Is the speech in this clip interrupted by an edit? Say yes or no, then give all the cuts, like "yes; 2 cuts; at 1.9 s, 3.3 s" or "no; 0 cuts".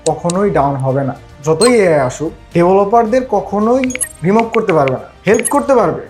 no; 0 cuts